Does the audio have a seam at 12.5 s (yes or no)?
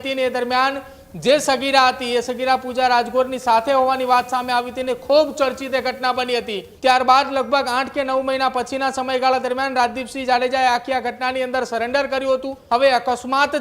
yes